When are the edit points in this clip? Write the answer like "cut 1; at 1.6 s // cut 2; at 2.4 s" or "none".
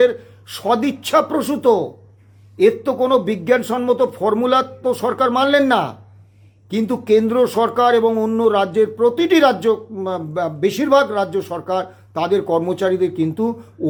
none